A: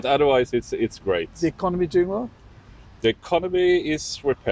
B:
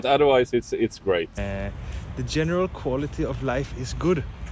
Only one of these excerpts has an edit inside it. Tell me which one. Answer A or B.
B